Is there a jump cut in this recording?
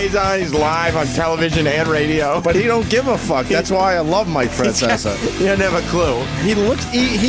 no; 0 cuts

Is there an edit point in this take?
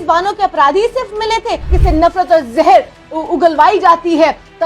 yes; 1 cut; at 1.7 s

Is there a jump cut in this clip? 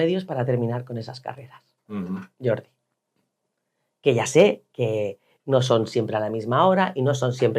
no; 0 cuts

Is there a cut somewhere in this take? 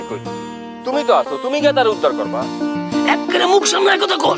yes; 2 cuts; at 2.1 s, 3.3 s

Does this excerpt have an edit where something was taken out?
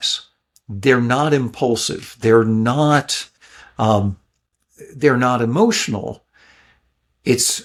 no; 0 cuts

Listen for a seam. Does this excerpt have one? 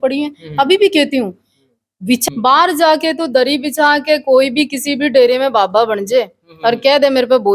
yes; 1 cut; at 2.2 s

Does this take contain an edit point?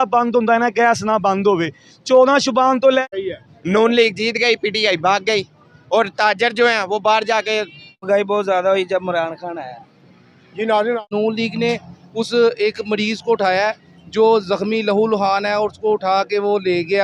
yes; 3 cuts; at 3.0 s, 7.9 s, 11.0 s

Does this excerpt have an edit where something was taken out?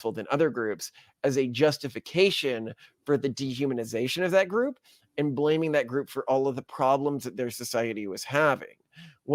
no; 0 cuts

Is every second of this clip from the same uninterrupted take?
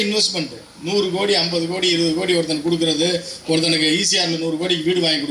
yes; 0 cuts

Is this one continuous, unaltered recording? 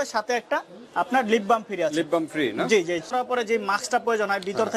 no; 1 cut; at 3.1 s

